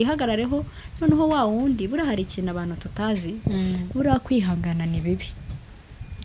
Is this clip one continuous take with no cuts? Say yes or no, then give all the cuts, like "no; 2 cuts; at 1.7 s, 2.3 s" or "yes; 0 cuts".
yes; 0 cuts